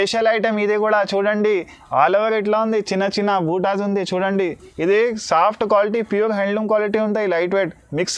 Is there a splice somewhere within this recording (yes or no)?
no